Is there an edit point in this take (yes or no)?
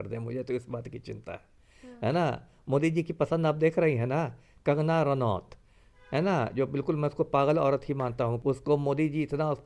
yes